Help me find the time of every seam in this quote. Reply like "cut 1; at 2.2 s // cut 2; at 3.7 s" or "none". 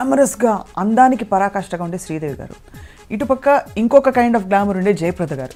none